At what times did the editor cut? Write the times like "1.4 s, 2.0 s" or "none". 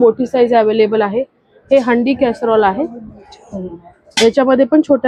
none